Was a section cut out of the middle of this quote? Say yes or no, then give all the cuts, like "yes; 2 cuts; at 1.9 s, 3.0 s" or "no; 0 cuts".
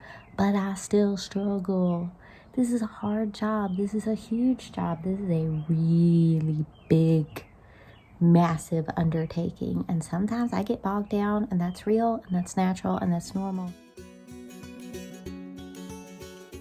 yes; 1 cut; at 13.6 s